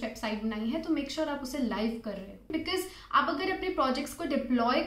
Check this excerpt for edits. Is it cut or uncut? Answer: cut